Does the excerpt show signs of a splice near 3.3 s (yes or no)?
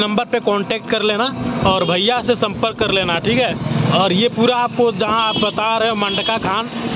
no